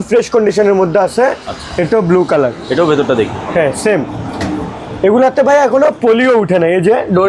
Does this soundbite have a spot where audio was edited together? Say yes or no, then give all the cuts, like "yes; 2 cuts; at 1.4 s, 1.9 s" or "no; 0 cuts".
no; 0 cuts